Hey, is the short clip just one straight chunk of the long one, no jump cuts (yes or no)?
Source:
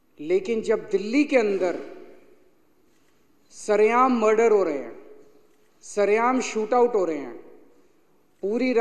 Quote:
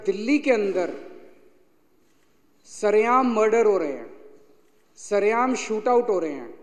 yes